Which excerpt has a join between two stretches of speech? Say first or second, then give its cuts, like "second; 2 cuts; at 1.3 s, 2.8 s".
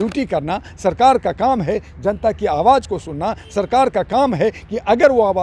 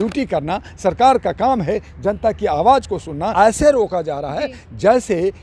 second; 1 cut; at 3.3 s